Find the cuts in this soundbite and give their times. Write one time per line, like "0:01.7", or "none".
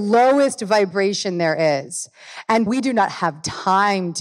0:02.7